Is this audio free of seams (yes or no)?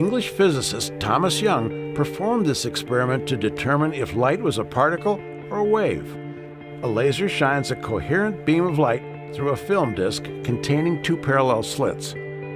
no